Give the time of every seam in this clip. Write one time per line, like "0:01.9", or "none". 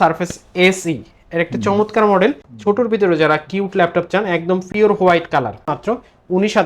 0:02.5
0:05.6